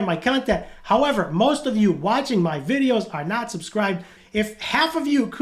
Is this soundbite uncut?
no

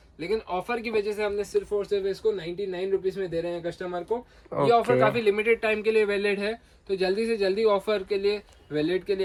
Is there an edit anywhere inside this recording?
no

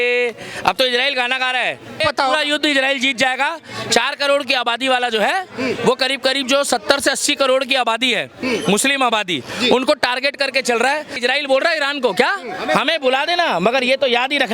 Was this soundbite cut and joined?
yes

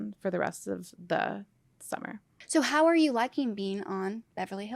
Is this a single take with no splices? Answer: no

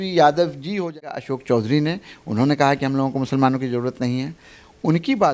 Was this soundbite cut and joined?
yes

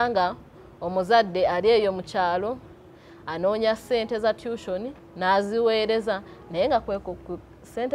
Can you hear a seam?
no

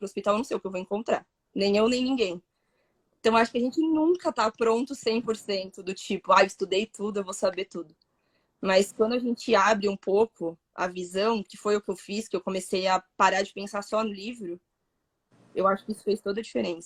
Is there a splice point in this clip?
no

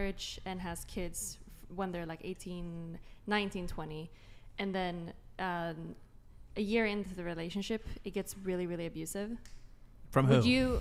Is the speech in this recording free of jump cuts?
yes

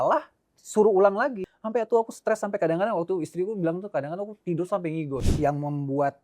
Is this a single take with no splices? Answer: no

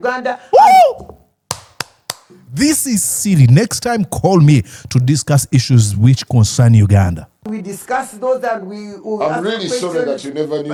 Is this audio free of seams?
yes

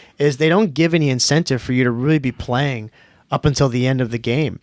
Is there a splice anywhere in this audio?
no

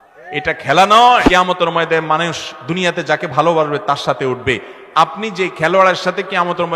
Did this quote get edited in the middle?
yes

